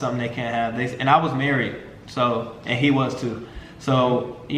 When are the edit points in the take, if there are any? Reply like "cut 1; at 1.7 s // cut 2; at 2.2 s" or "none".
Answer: none